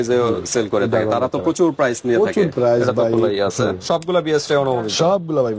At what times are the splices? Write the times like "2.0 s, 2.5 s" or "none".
2.9 s